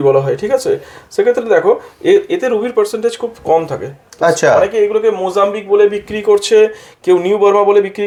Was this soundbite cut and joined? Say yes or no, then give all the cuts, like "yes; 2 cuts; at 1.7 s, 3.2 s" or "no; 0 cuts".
no; 0 cuts